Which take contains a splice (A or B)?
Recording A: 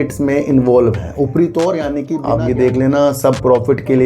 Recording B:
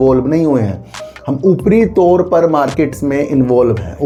A